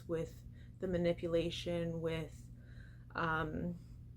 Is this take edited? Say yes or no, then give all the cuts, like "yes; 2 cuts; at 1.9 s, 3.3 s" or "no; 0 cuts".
no; 0 cuts